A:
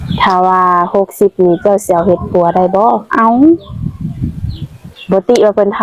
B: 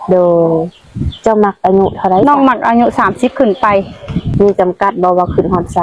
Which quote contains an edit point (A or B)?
B